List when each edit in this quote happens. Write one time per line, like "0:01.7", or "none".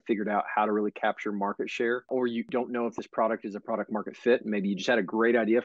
0:02.5